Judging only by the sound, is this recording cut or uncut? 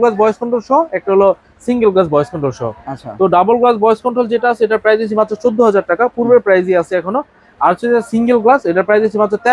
uncut